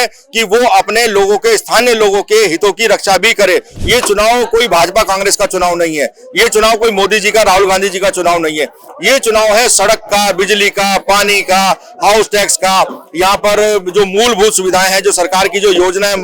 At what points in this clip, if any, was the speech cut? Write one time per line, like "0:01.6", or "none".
0:03.7